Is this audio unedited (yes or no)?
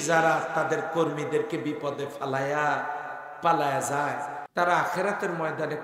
no